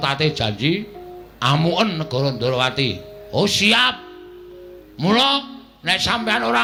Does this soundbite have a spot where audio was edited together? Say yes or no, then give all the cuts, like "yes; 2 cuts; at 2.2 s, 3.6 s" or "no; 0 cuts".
no; 0 cuts